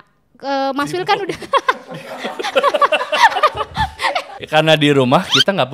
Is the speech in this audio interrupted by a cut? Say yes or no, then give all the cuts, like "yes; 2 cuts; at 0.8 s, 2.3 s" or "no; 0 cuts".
yes; 1 cut; at 4.4 s